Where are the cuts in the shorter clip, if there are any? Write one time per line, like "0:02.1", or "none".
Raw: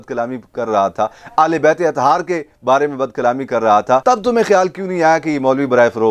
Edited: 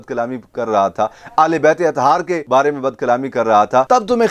0:02.4